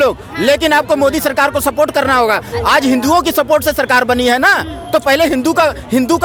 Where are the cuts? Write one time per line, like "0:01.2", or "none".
none